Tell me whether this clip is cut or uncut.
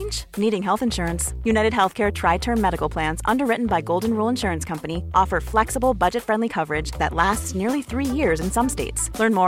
uncut